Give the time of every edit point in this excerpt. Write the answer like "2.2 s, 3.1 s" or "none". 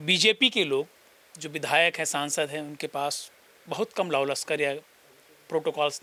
none